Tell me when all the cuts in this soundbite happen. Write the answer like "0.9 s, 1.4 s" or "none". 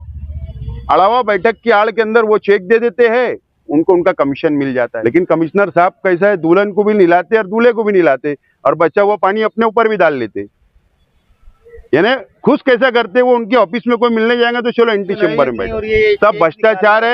4.9 s, 15.7 s